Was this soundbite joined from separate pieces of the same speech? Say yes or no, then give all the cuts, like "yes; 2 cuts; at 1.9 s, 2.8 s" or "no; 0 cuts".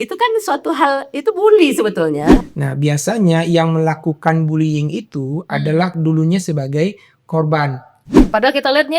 yes; 2 cuts; at 2.3 s, 8.2 s